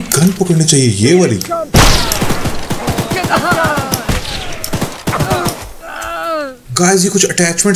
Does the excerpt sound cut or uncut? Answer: cut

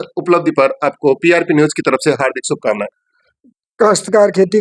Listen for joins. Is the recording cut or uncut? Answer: cut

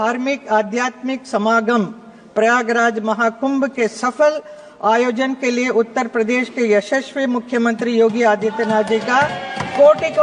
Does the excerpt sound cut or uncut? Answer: uncut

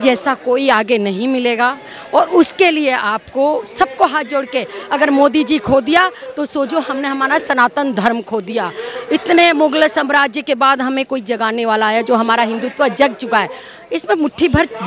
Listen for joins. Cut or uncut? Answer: uncut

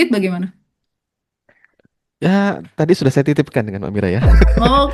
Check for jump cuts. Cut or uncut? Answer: uncut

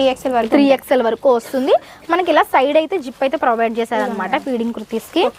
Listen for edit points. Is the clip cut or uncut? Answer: uncut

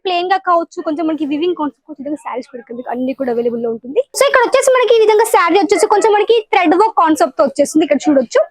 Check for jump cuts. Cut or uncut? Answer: cut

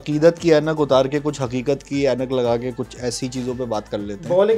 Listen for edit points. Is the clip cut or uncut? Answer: uncut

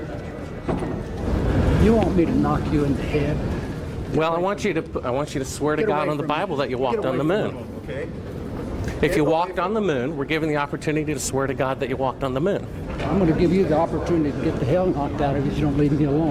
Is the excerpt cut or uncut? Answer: cut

